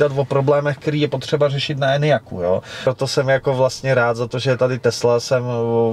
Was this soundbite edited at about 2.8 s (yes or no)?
yes